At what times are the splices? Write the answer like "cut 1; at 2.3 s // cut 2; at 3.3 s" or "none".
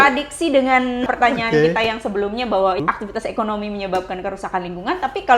cut 1; at 1.1 s // cut 2; at 2.8 s